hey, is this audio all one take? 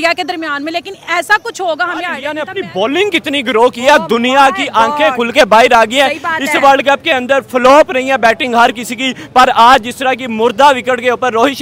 no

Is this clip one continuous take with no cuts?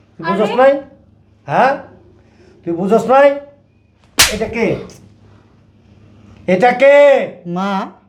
yes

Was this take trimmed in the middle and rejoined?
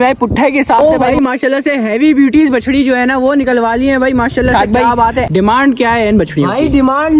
yes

